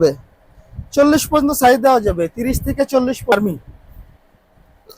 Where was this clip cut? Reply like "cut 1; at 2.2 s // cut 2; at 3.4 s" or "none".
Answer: cut 1; at 3.3 s